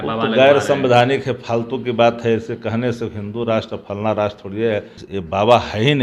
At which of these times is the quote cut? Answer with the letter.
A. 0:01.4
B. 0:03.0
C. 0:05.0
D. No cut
C